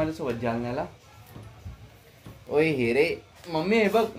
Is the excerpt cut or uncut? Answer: uncut